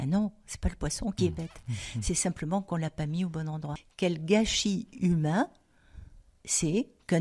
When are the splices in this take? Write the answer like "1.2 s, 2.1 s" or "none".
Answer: 1.2 s, 3.7 s